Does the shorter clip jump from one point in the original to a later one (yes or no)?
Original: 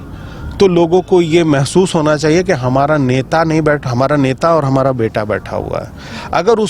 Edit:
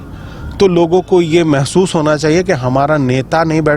no